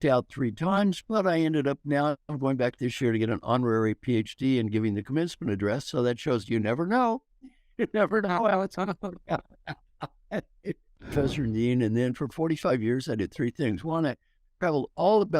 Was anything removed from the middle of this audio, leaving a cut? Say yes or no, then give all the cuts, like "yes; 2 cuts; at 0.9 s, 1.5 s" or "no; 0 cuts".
yes; 1 cut; at 11.0 s